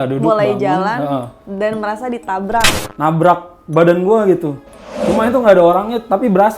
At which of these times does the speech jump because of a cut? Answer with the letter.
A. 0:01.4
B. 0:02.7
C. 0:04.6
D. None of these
B